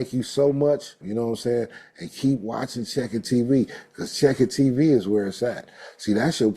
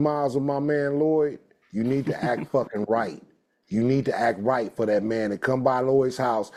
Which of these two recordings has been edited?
first; 1 cut; at 1.0 s

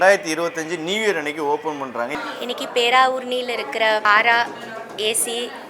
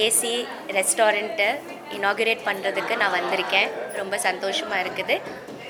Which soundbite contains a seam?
first; 2 cuts; at 2.1 s, 4.1 s

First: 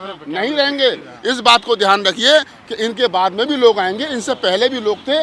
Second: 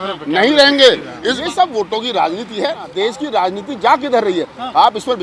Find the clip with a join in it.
second; 2 cuts; at 1.2 s, 2.9 s

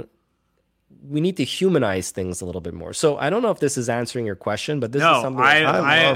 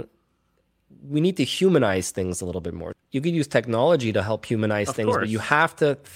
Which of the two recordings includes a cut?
second; 1 cut; at 2.8 s

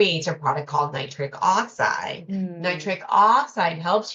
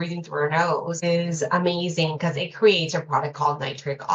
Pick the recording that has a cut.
second; 1 cut; at 1.0 s

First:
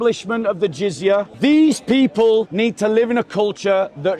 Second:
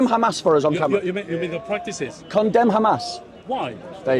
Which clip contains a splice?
first; 2 cuts; at 1.3 s, 2.5 s

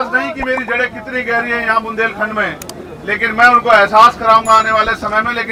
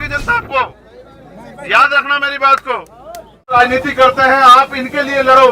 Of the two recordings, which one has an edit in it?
second; 1 cut; at 3.6 s

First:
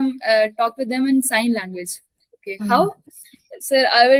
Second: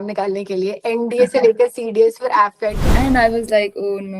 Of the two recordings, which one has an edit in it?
second; 1 cut; at 2.8 s

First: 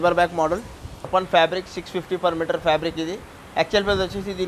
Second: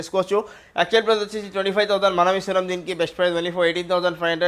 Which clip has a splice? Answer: first; 1 cut; at 1.1 s

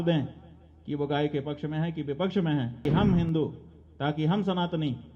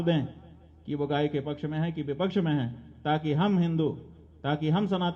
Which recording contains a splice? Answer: first; 1 cut; at 2.8 s

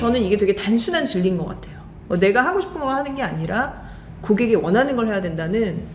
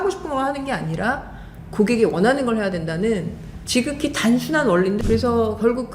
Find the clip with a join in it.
second; 1 cut; at 5.0 s

